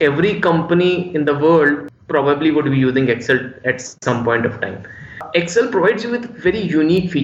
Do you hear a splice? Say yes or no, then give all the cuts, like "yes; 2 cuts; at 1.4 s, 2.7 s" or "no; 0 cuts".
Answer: yes; 2 cuts; at 1.9 s, 5.2 s